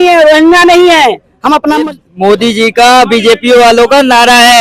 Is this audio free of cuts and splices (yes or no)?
no